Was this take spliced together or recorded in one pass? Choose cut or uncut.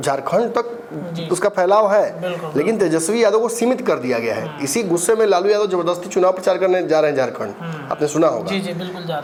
uncut